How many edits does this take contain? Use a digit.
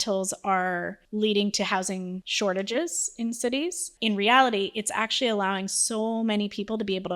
3